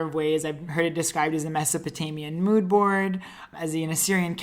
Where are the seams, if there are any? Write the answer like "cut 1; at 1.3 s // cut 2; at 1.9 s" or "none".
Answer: cut 1; at 3.5 s